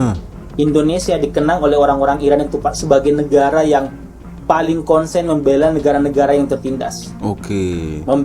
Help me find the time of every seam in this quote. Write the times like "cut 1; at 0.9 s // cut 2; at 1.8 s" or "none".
none